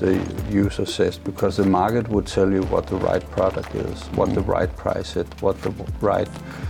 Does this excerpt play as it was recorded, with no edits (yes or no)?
no